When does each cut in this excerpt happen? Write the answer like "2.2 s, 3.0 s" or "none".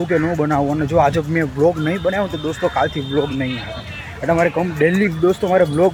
none

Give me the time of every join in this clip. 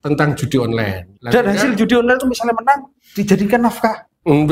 1.1 s

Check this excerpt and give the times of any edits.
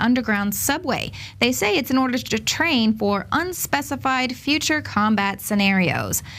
none

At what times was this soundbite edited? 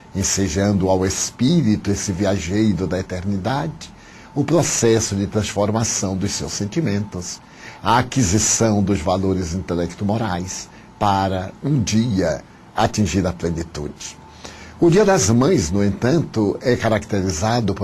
5.4 s

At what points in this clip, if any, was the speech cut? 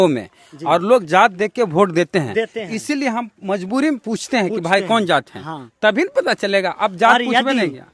none

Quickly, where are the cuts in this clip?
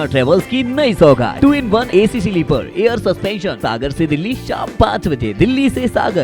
1.5 s, 3.6 s

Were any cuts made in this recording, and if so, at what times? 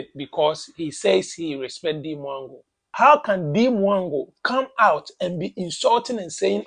2.9 s

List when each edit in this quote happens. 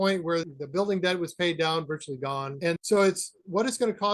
none

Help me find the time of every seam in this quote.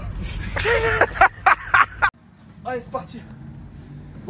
2.1 s

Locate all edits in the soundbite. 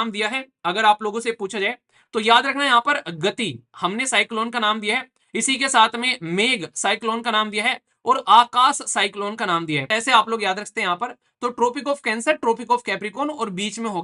9.8 s

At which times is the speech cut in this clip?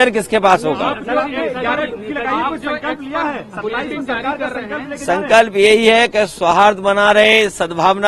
none

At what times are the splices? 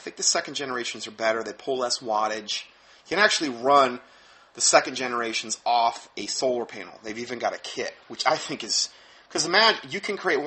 7.7 s

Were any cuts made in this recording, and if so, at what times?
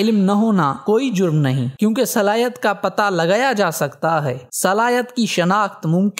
none

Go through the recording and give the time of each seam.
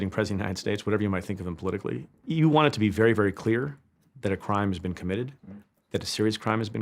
2.1 s

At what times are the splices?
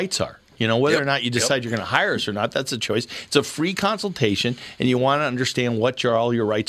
none

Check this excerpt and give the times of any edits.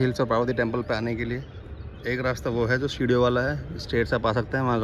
none

